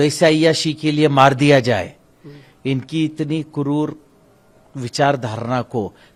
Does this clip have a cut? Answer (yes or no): no